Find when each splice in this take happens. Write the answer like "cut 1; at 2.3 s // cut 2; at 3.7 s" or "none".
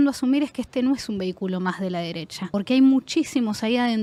none